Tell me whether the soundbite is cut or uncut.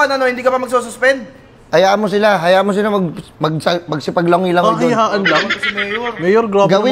uncut